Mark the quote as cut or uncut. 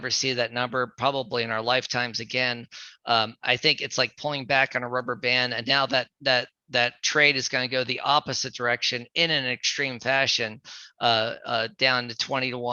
uncut